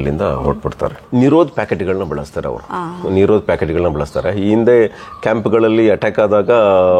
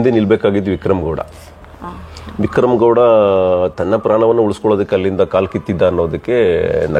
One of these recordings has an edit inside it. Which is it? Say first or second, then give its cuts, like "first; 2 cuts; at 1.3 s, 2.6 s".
first; 1 cut; at 1.0 s